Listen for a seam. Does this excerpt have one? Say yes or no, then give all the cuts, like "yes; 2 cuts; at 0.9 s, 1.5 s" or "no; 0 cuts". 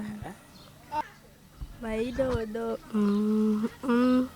yes; 1 cut; at 1.0 s